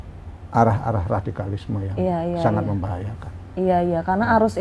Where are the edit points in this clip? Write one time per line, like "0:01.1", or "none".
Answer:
none

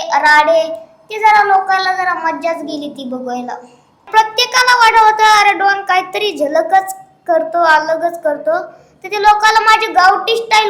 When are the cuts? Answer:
0:04.1

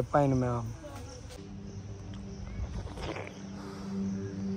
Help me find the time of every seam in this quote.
0:01.3

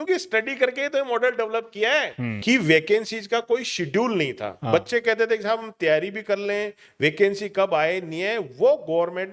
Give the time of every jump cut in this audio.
0:02.4

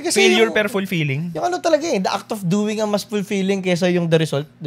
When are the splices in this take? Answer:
none

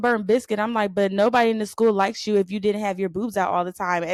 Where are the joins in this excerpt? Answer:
none

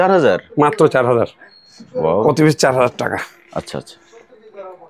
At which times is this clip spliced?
none

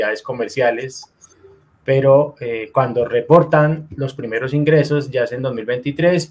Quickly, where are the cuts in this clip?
none

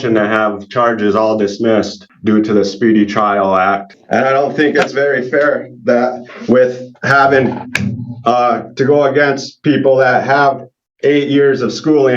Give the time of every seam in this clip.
0:02.0
0:03.9

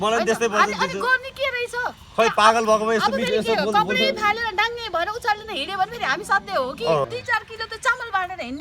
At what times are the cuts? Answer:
0:07.1

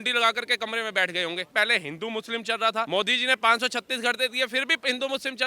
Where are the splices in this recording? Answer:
0:01.4
0:02.9

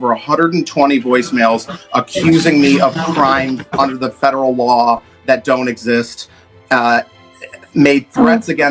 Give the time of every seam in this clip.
none

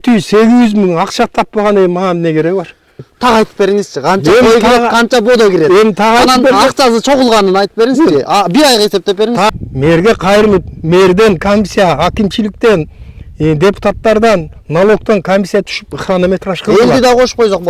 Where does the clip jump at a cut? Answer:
0:03.1
0:09.5

